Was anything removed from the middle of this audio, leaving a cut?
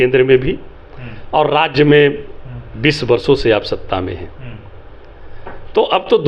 no; 0 cuts

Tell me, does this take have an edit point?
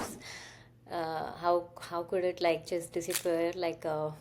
no; 0 cuts

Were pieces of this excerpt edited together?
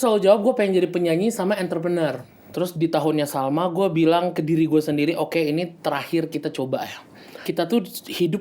yes; 2 cuts; at 2.4 s, 7.5 s

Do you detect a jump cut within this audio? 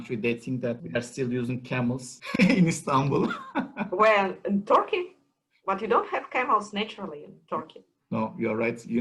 yes; 2 cuts; at 0.8 s, 2.1 s

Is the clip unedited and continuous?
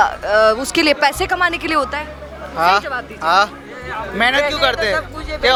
yes; 0 cuts

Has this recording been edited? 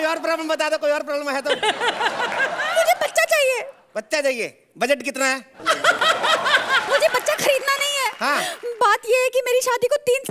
no; 0 cuts

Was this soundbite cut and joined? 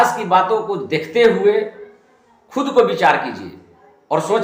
no; 0 cuts

